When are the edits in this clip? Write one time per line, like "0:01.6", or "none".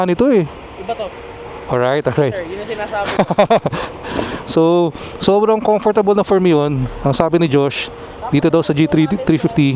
none